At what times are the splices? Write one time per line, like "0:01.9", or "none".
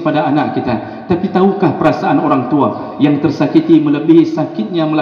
none